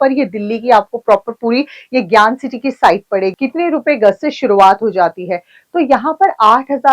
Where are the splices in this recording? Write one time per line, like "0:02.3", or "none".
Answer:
0:03.3